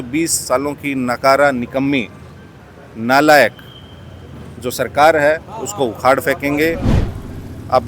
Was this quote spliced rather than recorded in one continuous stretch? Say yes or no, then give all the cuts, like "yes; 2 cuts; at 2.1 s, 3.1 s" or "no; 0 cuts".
yes; 1 cut; at 6.9 s